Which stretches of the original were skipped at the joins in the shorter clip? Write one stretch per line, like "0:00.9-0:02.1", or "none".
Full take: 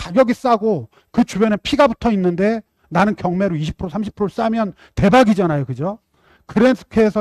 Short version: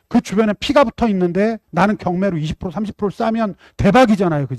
0:02.7-0:02.8